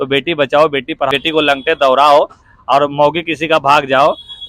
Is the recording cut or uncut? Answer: cut